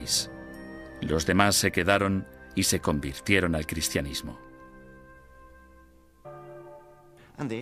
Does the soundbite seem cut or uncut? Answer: uncut